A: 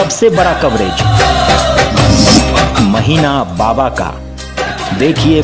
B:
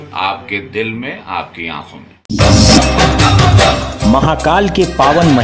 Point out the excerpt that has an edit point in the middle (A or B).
B